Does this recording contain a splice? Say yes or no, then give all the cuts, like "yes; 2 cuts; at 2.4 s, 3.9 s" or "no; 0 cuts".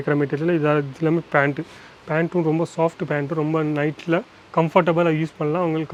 no; 0 cuts